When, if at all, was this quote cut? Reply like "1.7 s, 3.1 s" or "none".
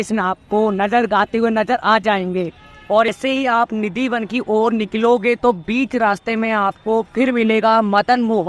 3.1 s